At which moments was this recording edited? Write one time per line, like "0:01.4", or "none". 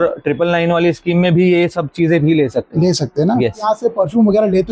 0:03.6